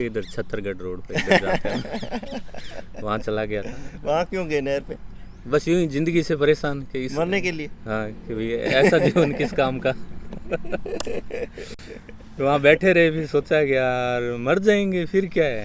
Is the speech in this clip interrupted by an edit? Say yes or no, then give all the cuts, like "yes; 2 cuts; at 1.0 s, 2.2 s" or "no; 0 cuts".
no; 0 cuts